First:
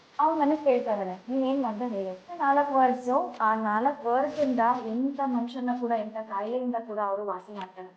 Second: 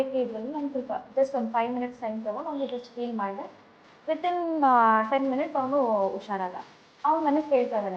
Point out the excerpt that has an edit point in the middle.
first; 1 cut; at 2.4 s

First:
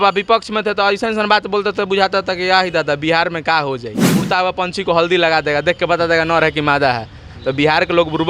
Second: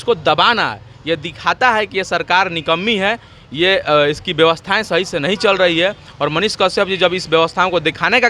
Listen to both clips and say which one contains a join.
first; 1 cut; at 3.9 s

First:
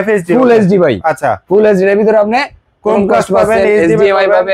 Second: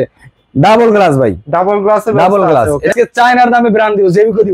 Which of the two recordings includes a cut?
second; 1 cut; at 2.9 s

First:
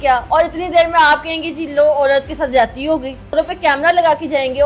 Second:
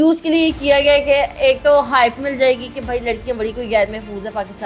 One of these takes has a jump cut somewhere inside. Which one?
first; 1 cut; at 3.4 s

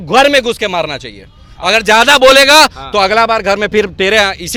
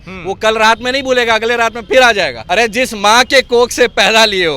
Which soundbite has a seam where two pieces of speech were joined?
second; 1 cut; at 2.4 s

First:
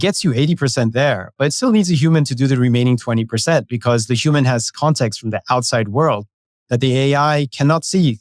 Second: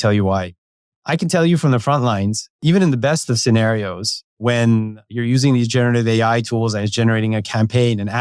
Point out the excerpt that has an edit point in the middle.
second; 4 cuts; at 0.9 s, 2.6 s, 4.4 s, 5.1 s

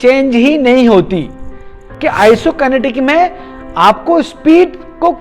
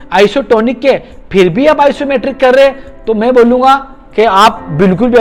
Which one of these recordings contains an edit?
first; 1 cut; at 1.8 s

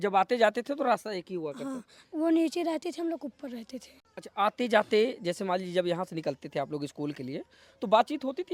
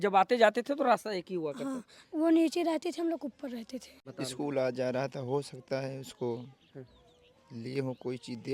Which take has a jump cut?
second; 1 cut; at 4.0 s

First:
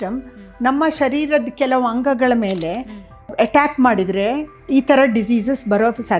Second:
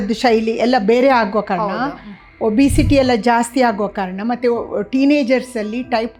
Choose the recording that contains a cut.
first; 2 cuts; at 3.3 s, 4.6 s

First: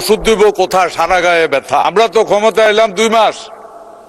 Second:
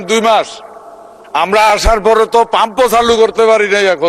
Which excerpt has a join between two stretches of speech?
first; 1 cut; at 1.9 s

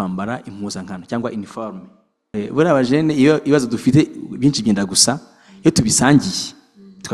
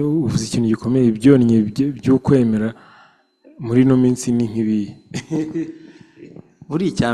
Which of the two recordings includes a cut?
first; 1 cut; at 2.2 s

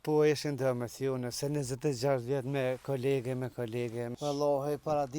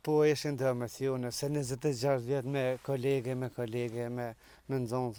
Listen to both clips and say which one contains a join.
first; 1 cut; at 4.1 s

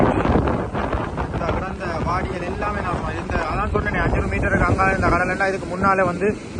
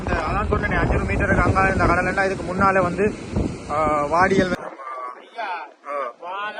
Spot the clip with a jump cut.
second; 1 cut; at 4.6 s

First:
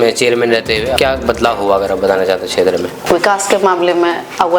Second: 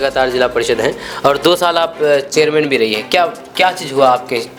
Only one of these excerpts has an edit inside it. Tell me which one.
first; 2 cuts; at 0.9 s, 3.0 s

